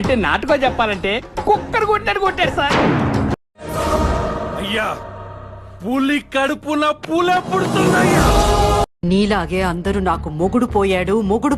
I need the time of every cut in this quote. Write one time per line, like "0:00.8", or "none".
0:03.4
0:09.0